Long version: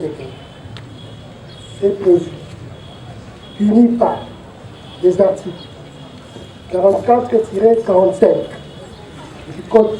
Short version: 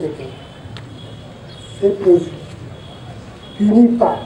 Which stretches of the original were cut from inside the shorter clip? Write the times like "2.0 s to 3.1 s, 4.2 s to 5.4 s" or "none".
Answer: none